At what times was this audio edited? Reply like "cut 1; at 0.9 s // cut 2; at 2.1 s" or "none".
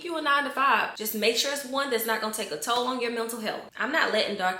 cut 1; at 3.6 s